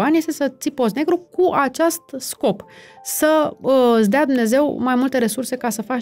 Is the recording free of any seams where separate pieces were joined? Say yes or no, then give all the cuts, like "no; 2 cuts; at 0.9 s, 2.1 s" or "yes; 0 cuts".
yes; 0 cuts